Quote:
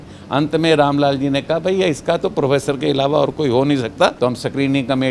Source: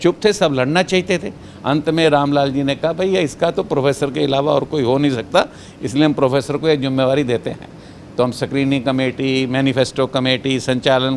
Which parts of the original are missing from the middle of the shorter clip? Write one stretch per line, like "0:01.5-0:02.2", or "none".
0:05.5-0:08.1